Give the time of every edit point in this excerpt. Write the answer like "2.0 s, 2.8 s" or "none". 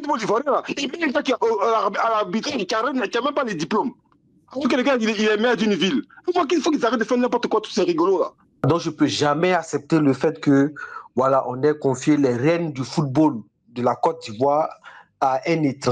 8.5 s